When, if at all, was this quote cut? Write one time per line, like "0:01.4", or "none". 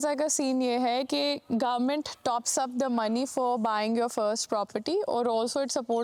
none